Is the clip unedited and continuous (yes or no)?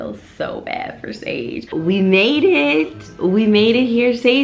no